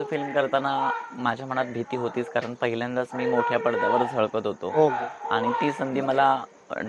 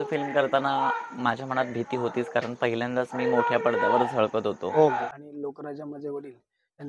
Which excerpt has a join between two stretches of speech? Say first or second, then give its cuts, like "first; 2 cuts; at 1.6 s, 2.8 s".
second; 1 cut; at 5.1 s